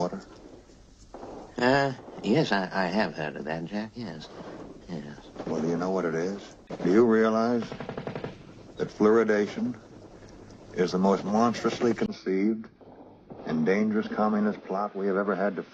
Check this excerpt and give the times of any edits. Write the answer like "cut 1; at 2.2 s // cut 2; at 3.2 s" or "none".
none